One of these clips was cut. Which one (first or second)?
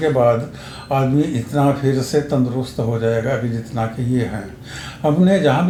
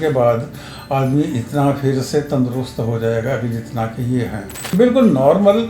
second